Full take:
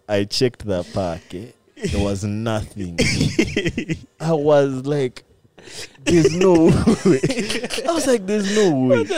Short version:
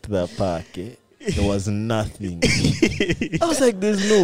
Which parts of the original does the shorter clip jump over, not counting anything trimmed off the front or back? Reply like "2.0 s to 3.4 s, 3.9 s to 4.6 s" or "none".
3.9 s to 7.8 s